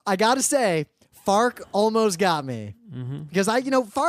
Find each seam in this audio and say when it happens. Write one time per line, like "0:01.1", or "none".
0:02.7